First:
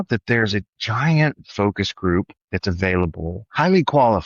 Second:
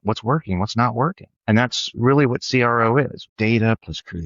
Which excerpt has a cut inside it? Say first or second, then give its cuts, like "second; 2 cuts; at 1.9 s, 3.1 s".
second; 2 cuts; at 1.3 s, 3.2 s